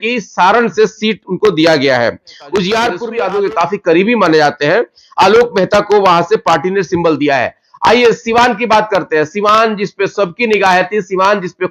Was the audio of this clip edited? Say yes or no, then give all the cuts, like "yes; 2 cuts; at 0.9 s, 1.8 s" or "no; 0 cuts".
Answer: yes; 1 cut; at 3.0 s